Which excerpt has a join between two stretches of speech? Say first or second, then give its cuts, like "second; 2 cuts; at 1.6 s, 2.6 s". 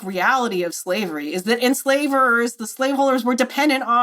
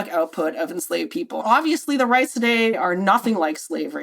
second; 2 cuts; at 1.4 s, 2.8 s